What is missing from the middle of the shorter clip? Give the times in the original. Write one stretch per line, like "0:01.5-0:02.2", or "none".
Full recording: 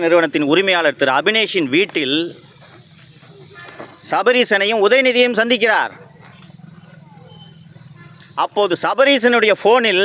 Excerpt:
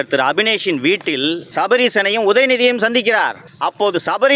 0:02.3-0:04.0
0:06.0-0:08.2